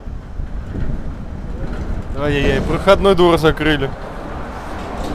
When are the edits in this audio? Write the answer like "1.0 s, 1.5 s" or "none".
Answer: none

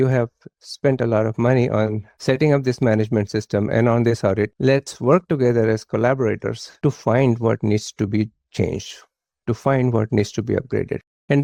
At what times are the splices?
none

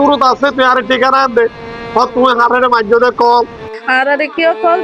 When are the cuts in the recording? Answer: 3.7 s

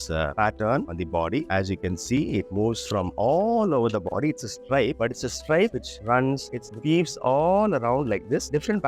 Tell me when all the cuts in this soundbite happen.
none

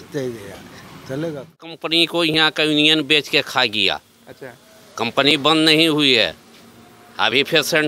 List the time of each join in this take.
1.8 s

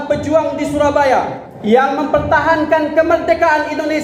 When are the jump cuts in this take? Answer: 1.4 s

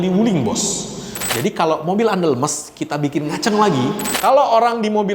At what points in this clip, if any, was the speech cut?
1.2 s, 4.1 s

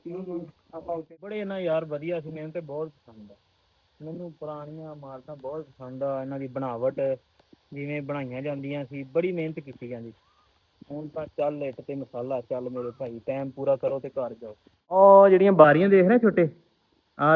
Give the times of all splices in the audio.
1.1 s, 15.0 s

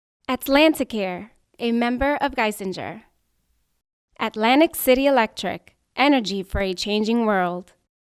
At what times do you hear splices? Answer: none

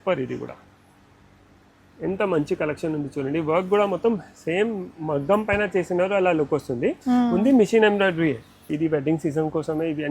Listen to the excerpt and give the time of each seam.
8.7 s

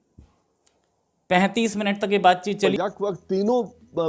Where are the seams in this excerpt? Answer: 2.7 s

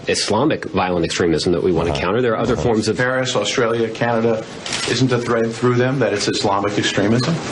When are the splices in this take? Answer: 3.5 s

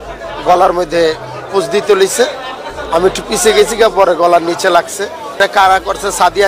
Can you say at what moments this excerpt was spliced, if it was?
5.4 s

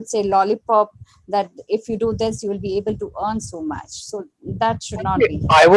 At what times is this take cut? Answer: none

